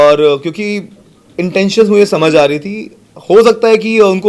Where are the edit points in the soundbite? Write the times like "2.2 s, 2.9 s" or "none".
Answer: none